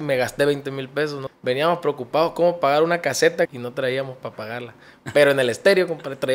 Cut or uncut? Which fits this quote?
cut